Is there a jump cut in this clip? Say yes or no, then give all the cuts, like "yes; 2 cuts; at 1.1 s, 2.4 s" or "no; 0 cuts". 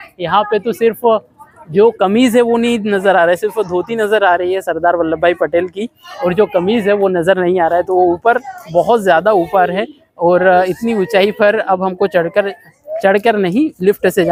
no; 0 cuts